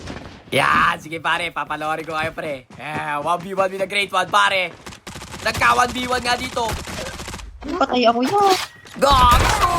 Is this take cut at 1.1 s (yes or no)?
no